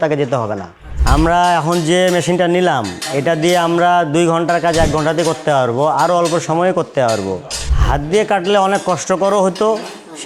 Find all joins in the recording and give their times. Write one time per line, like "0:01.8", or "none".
0:00.9
0:07.6